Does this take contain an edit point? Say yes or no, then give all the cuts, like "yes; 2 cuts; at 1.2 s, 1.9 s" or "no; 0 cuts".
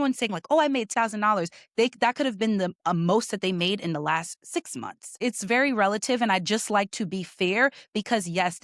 yes; 2 cuts; at 0.9 s, 5.2 s